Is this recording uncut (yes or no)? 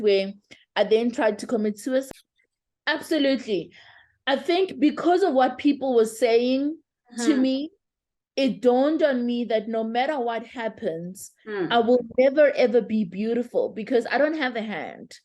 no